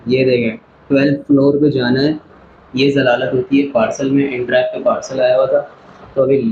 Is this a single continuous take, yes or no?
yes